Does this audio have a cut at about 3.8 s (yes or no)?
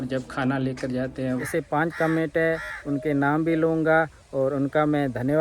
no